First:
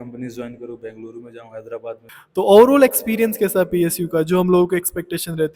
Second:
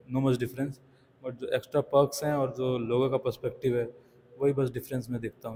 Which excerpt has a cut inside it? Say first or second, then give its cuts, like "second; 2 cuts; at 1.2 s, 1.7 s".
first; 1 cut; at 2.1 s